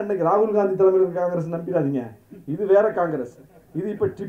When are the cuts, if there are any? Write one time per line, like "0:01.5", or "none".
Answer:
none